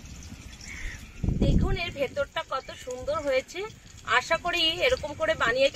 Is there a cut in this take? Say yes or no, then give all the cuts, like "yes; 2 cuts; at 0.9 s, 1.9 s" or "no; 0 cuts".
yes; 1 cut; at 1.1 s